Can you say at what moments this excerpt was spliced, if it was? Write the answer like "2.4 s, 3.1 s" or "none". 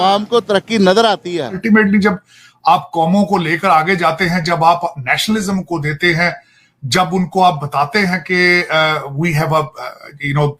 1.6 s